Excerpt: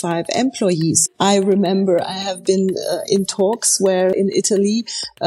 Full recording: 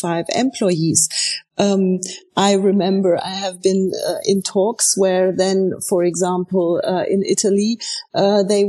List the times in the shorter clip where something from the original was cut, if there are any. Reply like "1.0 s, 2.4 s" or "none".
1.1 s, 4.1 s